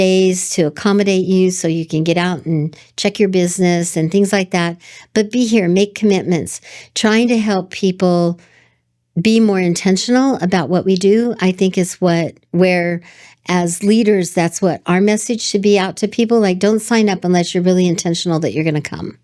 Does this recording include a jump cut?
no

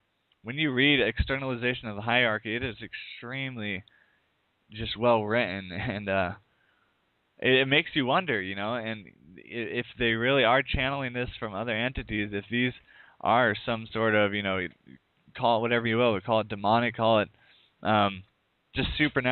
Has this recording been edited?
yes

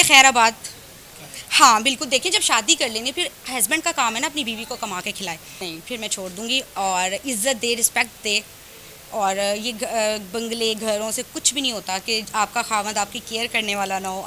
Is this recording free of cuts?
no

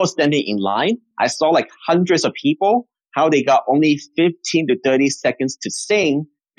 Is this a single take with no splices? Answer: yes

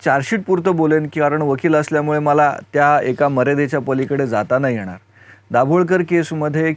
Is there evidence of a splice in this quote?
no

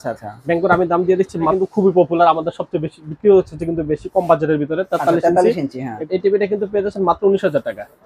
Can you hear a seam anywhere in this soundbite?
yes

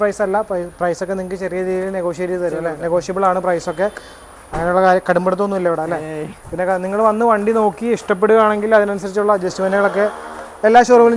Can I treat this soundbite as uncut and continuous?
yes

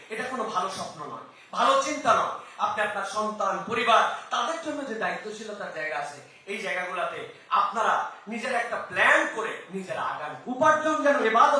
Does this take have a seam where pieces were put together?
yes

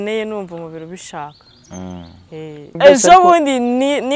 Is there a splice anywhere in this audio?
yes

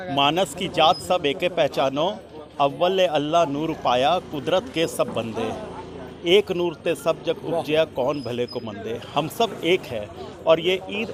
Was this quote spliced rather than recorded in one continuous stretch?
no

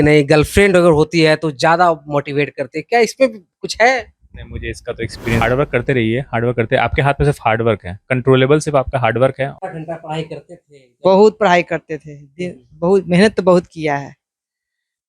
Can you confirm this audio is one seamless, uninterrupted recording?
no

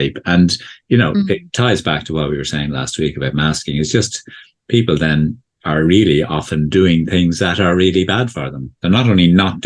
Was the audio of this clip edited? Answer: no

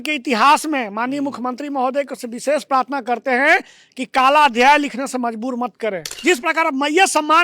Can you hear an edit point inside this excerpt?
yes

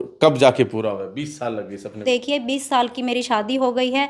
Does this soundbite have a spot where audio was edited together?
yes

